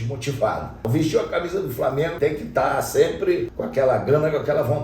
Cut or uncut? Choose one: cut